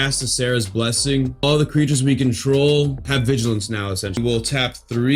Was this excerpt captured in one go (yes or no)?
no